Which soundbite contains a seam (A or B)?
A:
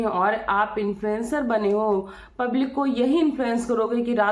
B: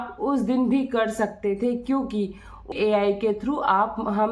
B